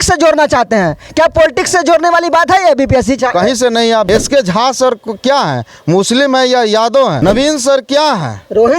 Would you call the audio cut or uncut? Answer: cut